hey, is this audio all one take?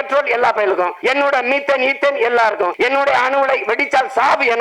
no; 2 cuts; at 0.9 s, 2.7 s

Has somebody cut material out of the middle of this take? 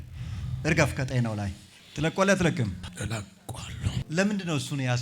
yes; 2 cuts; at 2.9 s, 4.1 s

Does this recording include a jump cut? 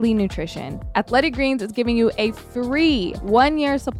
yes; 2 cuts; at 0.9 s, 3.1 s

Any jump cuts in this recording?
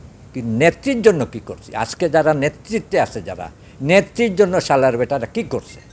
no; 0 cuts

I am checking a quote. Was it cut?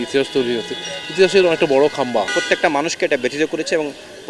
yes; 1 cut; at 2.3 s

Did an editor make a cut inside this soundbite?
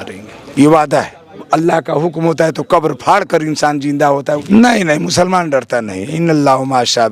yes; 2 cuts; at 1.4 s, 4.4 s

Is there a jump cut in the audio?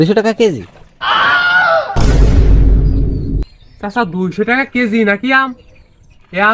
no; 0 cuts

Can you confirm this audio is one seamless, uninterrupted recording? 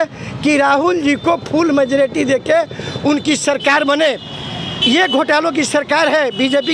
yes; 0 cuts

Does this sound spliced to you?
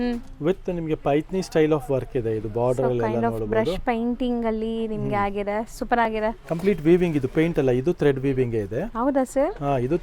no; 0 cuts

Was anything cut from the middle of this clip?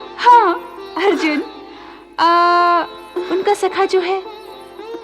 no; 0 cuts

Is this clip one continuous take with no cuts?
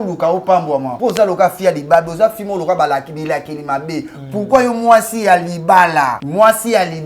no; 2 cuts; at 0.9 s, 6.2 s

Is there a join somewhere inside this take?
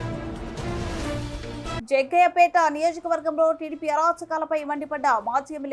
yes; 1 cut; at 1.8 s

